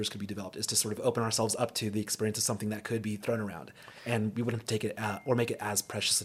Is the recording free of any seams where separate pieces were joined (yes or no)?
no